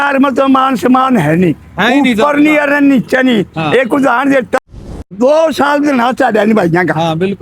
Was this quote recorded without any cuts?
no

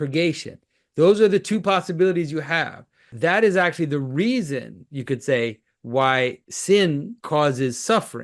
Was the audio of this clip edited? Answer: yes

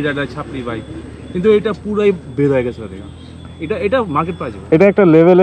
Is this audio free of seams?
yes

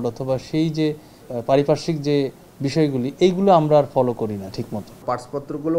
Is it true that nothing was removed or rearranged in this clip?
no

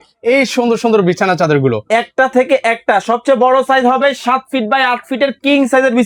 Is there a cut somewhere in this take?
no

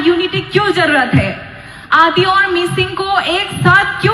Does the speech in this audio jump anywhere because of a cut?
yes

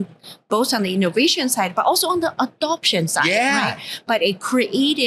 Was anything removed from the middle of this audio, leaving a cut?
no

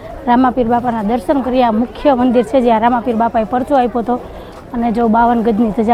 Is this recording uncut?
yes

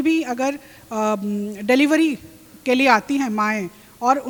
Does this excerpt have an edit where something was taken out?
no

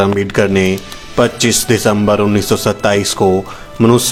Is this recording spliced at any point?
no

